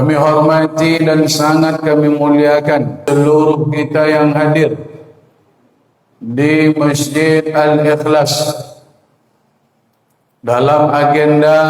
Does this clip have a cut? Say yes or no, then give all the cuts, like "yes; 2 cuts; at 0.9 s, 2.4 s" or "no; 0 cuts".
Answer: yes; 1 cut; at 3.0 s